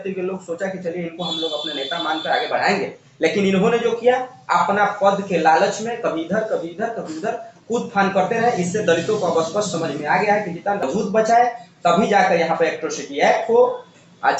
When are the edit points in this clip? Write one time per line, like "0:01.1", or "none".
0:10.8